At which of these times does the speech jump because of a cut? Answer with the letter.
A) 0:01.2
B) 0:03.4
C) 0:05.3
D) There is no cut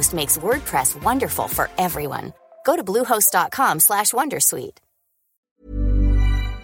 C